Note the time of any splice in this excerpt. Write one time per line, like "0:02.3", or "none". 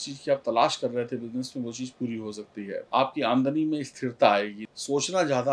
0:02.8
0:04.6